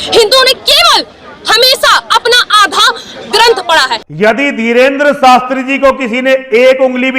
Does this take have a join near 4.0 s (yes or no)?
yes